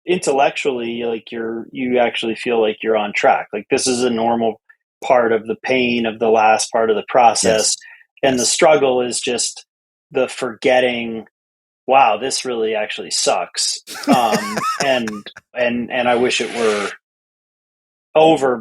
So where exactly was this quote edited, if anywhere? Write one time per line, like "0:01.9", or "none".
0:15.6